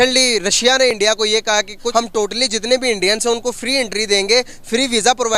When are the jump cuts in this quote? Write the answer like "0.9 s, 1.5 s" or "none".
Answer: 1.8 s